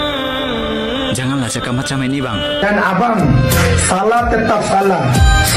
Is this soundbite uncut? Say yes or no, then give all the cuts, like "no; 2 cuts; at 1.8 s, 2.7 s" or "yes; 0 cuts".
no; 1 cut; at 2.6 s